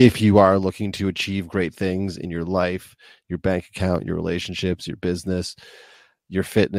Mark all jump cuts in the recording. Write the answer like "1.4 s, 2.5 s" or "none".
none